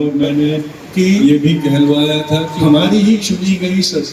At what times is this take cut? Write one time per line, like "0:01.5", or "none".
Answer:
0:02.5